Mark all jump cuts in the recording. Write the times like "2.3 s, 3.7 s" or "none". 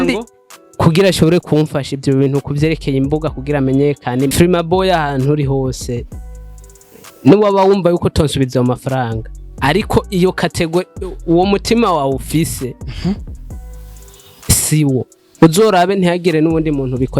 4.3 s